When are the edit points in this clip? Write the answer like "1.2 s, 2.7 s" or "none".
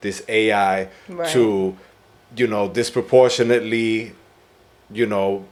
none